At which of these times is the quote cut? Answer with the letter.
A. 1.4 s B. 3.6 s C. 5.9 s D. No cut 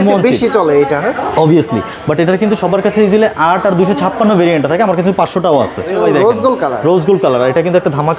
C